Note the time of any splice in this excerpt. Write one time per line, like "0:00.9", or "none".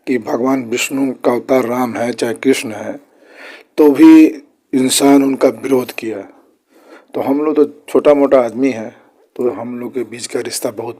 0:09.5